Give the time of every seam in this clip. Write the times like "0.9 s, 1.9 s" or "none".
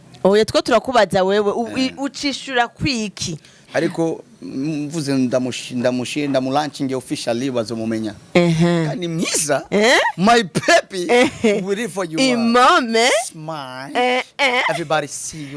3.7 s